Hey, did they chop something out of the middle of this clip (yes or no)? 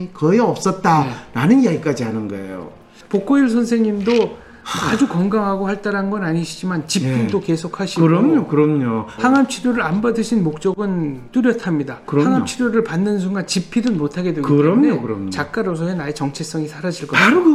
yes